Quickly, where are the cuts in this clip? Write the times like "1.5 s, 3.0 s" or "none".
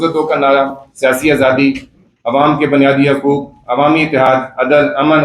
none